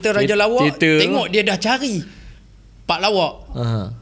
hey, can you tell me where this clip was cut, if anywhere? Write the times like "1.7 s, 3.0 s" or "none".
none